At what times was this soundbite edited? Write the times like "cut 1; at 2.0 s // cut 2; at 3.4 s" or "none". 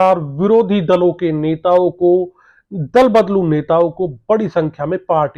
none